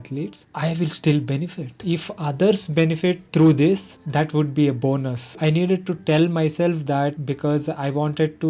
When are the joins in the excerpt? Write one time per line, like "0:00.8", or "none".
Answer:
0:01.7
0:03.2
0:05.4
0:07.2